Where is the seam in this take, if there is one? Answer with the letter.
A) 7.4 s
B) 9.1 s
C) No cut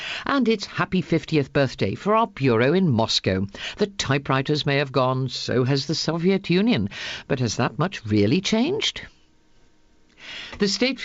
A